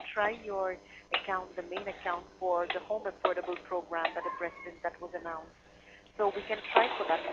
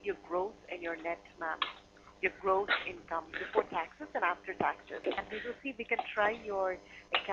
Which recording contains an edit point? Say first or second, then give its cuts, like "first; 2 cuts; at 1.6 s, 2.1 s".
second; 1 cut; at 5.1 s